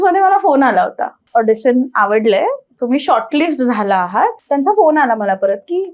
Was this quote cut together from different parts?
yes; 2 cuts; at 1.1 s, 4.4 s

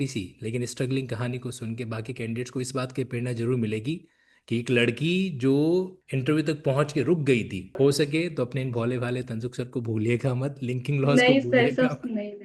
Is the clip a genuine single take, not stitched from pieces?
no; 2 cuts; at 6.0 s, 7.7 s

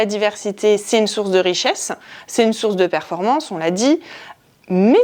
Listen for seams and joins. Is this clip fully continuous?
yes; 0 cuts

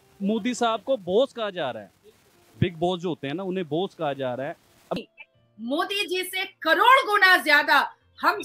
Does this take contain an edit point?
yes; 1 cut; at 4.9 s

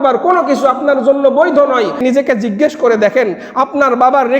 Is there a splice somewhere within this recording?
yes; 1 cut; at 2.0 s

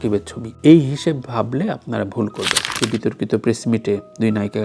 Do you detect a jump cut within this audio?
yes; 1 cut; at 2.7 s

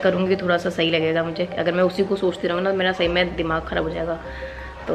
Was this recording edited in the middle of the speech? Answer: no; 0 cuts

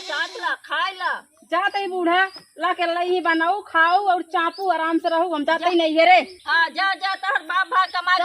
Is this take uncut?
no; 1 cut; at 1.3 s

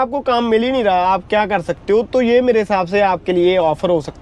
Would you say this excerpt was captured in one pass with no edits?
yes; 0 cuts

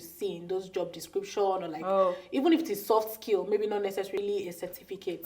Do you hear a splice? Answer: yes; 1 cut; at 4.2 s

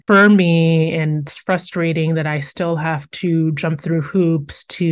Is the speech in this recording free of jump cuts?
yes; 0 cuts

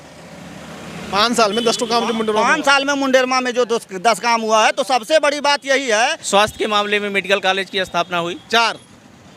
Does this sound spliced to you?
yes; 1 cut; at 6.2 s

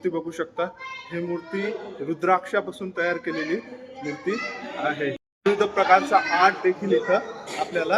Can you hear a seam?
yes; 1 cut; at 5.3 s

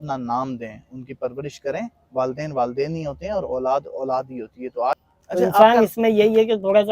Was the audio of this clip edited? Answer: yes; 1 cut; at 5.0 s

